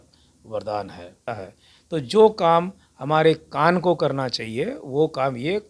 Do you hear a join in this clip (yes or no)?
yes